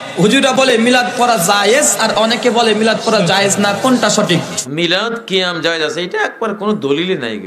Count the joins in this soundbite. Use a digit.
1